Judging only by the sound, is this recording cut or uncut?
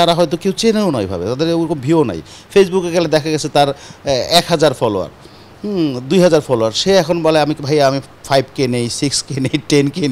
uncut